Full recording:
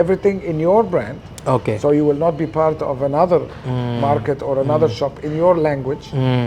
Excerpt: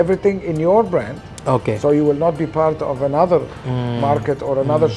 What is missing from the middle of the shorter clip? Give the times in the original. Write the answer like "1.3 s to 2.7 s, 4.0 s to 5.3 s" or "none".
none